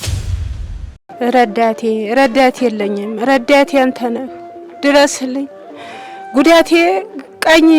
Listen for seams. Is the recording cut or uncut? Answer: cut